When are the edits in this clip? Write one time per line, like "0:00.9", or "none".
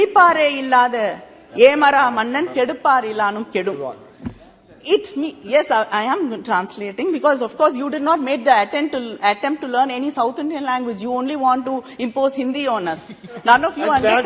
none